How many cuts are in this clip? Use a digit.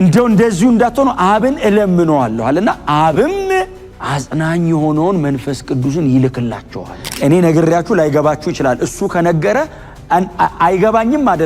1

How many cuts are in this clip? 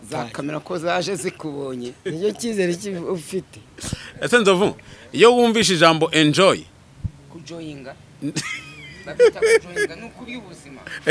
0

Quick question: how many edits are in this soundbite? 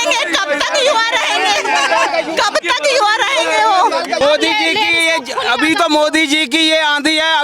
1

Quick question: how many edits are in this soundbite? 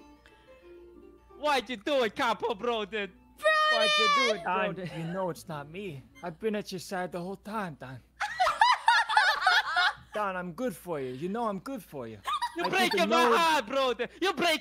3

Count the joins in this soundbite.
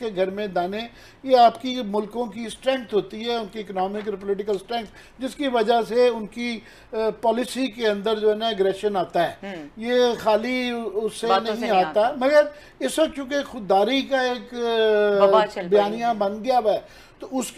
0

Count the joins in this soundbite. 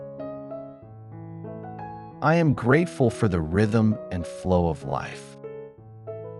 2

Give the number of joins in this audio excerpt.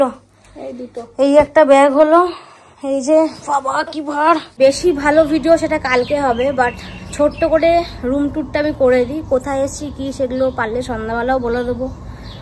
1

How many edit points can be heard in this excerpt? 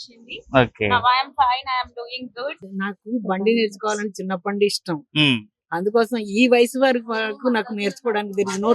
1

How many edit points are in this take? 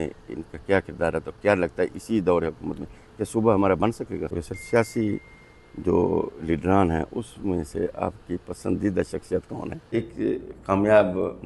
2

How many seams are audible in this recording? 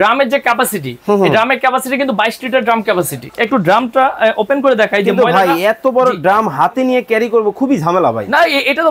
1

